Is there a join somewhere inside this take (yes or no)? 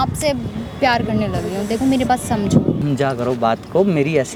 no